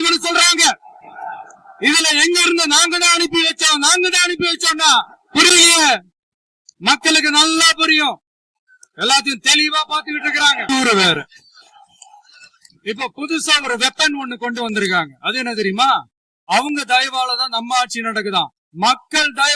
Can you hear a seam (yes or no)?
yes